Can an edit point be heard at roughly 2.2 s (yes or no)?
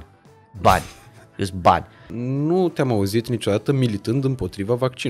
yes